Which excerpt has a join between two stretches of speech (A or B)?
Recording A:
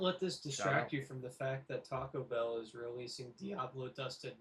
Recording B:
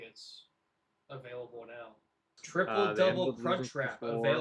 B